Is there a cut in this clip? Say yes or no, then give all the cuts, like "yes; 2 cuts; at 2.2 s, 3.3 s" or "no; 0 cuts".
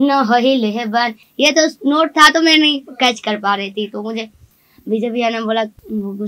no; 0 cuts